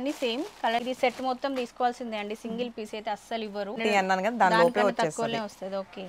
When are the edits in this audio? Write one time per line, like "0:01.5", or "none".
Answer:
0:00.8
0:03.8